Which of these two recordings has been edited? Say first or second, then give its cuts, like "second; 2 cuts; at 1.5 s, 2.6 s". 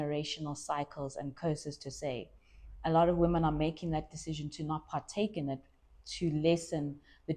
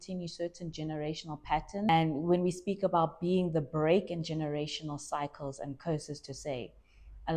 second; 1 cut; at 1.9 s